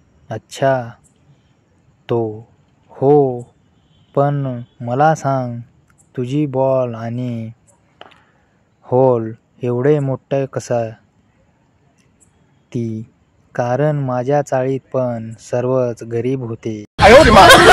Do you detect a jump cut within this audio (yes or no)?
yes